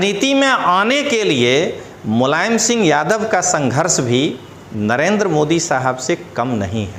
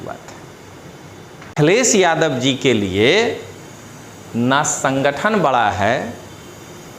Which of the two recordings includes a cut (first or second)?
second